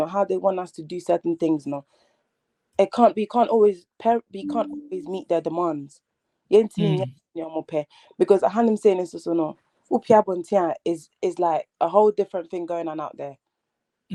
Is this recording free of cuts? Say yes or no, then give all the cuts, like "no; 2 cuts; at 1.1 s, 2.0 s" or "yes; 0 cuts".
yes; 0 cuts